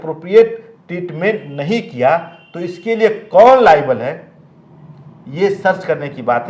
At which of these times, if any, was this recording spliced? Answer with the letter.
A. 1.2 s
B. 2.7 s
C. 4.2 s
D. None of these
D